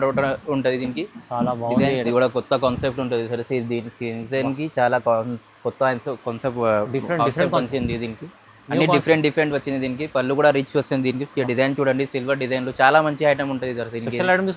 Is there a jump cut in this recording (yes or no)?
yes